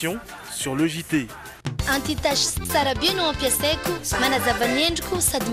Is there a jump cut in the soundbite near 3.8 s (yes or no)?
no